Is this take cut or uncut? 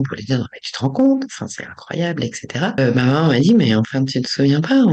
cut